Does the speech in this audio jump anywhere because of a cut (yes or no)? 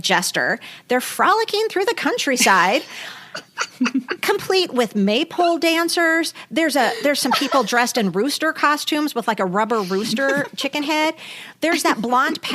no